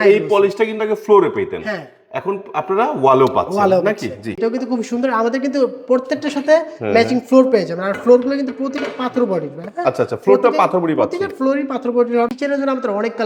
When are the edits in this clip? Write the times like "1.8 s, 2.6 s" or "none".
4.4 s, 12.3 s